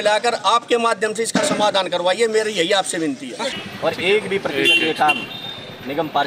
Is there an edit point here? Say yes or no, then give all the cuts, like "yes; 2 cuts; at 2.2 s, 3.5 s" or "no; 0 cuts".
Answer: yes; 1 cut; at 3.6 s